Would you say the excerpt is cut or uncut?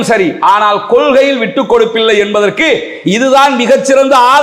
uncut